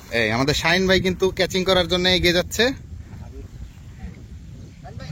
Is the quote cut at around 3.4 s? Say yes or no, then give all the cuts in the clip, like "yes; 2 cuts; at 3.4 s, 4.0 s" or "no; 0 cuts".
no; 0 cuts